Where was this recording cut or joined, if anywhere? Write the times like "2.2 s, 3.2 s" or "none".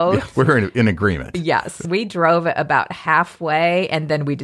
1.8 s